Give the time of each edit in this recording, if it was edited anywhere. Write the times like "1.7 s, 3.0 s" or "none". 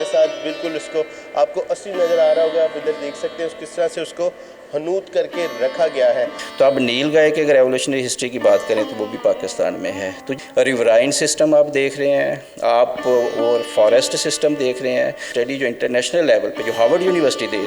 6.4 s, 10.3 s, 15.3 s